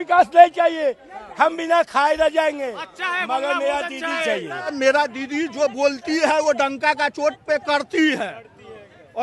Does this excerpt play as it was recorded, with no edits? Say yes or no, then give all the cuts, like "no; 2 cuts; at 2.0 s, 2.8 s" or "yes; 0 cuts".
no; 1 cut; at 4.7 s